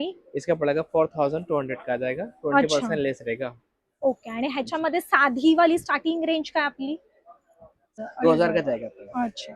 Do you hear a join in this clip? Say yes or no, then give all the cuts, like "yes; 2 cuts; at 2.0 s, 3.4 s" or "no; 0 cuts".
yes; 1 cut; at 8.0 s